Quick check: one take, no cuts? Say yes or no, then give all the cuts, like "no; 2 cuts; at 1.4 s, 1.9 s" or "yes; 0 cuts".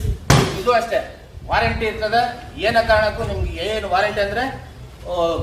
yes; 0 cuts